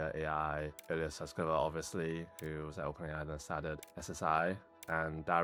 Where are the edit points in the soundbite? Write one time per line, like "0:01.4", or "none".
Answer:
none